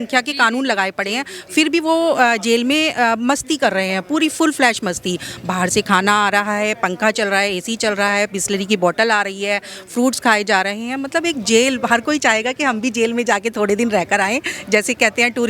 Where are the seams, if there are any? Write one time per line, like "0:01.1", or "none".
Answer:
none